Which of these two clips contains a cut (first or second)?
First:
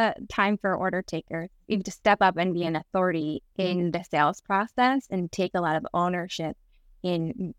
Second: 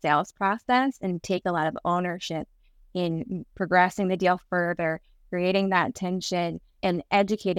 first